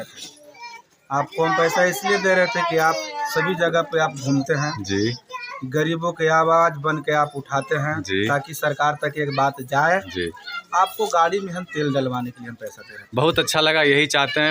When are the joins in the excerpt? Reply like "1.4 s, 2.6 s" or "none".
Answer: none